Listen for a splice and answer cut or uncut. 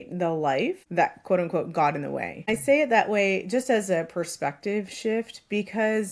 cut